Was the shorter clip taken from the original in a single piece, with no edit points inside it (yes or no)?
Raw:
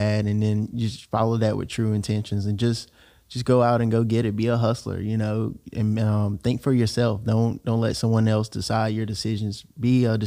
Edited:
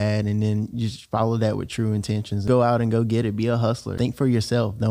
no